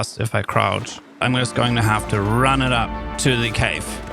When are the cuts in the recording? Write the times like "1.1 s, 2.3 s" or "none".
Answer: 1.2 s, 3.1 s